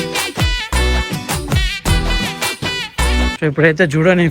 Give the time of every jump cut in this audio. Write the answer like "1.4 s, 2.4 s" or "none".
3.3 s